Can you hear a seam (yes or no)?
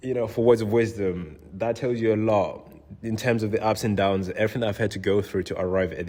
no